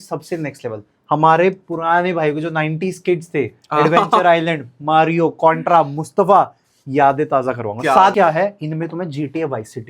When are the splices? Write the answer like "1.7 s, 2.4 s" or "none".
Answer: 8.1 s